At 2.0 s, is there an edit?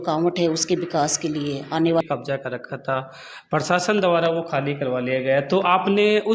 yes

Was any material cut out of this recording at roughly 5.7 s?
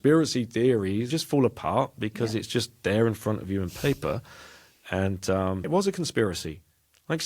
yes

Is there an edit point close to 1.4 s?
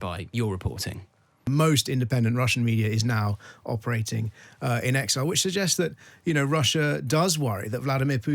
yes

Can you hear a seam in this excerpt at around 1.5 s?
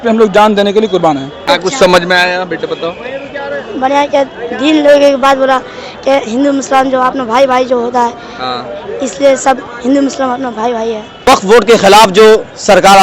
yes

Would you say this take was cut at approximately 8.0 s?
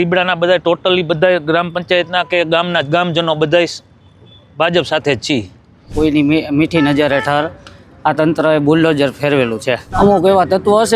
no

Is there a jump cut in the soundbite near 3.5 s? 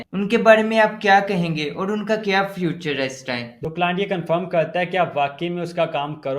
yes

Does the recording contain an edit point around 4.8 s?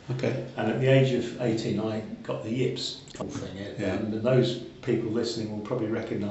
no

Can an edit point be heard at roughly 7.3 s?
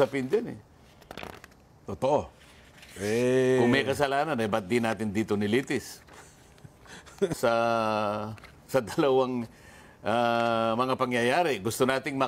yes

